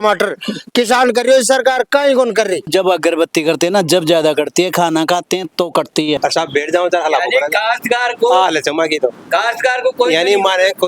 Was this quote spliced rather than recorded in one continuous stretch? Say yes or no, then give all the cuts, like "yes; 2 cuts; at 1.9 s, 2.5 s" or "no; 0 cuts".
yes; 2 cuts; at 2.7 s, 6.2 s